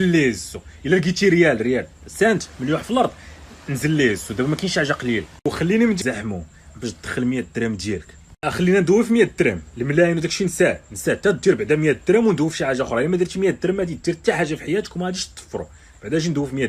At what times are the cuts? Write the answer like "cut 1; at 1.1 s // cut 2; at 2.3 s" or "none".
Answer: cut 1; at 6.0 s